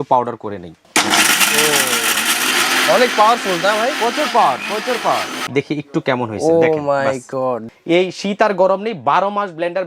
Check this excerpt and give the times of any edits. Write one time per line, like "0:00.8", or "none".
0:02.5
0:05.4
0:07.7